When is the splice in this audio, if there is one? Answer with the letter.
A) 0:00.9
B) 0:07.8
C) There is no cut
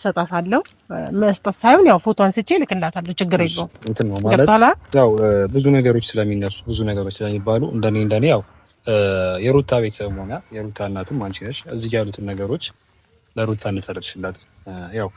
C